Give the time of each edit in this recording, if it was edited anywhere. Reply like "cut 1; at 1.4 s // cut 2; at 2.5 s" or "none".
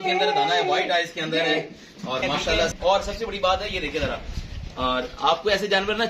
cut 1; at 2.7 s